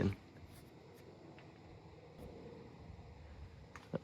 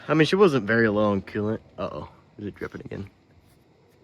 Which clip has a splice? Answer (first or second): first